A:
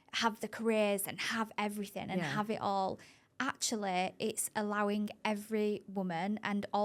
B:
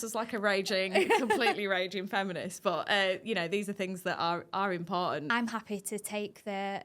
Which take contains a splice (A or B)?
B